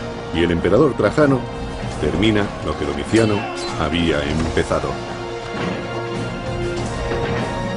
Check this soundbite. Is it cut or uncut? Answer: uncut